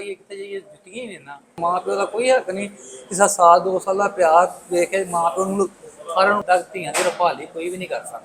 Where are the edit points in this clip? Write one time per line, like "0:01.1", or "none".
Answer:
0:01.6
0:06.4